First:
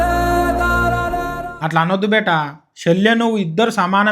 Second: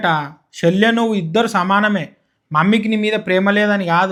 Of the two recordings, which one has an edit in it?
first; 1 cut; at 1.3 s

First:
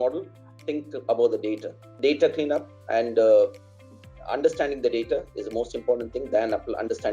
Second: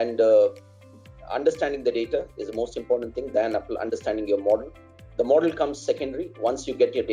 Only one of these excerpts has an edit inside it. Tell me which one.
first; 1 cut; at 2.0 s

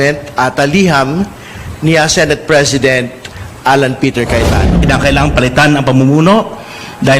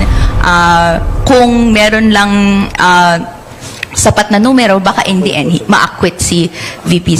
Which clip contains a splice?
first; 1 cut; at 4.8 s

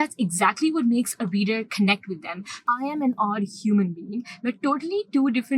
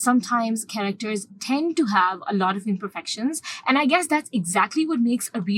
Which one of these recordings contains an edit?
first; 1 cut; at 2.5 s

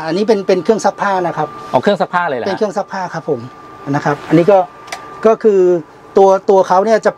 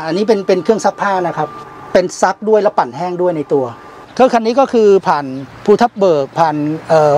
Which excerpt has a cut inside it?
second; 2 cuts; at 1.5 s, 4.0 s

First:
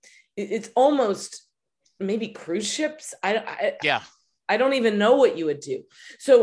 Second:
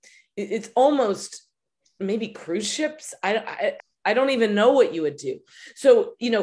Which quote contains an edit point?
second; 1 cut; at 3.8 s

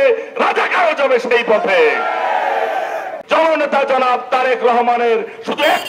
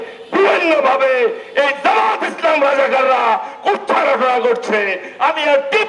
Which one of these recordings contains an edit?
first; 1 cut; at 3.1 s

